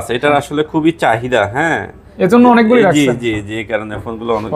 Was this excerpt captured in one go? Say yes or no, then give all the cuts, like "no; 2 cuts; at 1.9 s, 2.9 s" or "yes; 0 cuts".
yes; 0 cuts